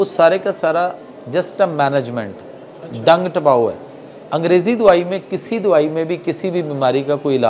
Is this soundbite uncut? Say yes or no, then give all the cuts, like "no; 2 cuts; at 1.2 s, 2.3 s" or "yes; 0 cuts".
yes; 0 cuts